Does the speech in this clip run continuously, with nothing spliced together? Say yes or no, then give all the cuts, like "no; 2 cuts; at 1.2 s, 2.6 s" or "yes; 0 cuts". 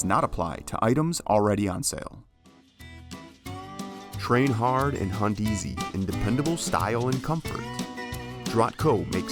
no; 1 cut; at 2.1 s